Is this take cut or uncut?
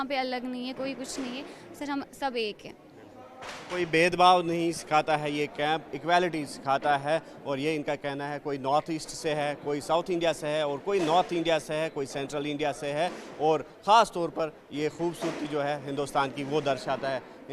uncut